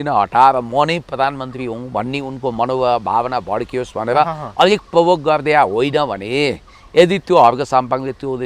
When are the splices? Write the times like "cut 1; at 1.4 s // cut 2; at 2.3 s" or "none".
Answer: none